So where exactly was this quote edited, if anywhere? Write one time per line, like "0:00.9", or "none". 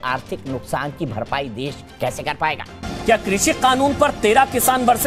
0:02.9